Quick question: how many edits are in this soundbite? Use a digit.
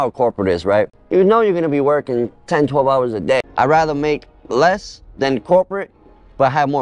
2